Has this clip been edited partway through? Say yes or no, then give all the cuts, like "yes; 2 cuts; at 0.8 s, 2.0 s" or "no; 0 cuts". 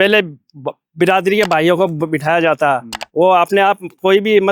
no; 0 cuts